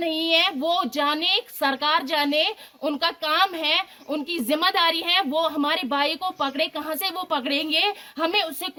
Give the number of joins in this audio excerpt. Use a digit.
0